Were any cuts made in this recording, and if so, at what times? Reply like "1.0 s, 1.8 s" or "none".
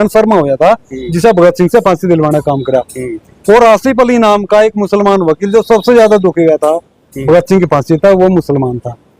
none